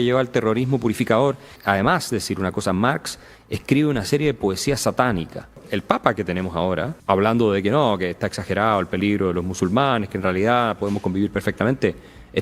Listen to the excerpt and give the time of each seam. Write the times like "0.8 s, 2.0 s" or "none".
1.5 s, 5.7 s, 6.9 s